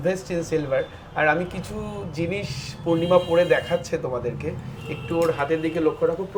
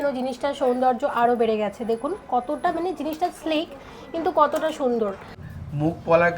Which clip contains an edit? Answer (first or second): second